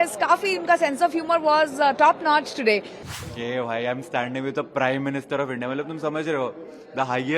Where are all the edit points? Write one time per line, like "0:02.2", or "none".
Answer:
0:02.9